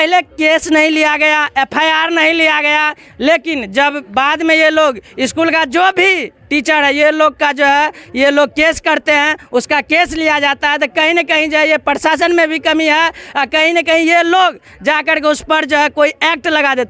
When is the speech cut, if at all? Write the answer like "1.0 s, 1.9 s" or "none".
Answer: none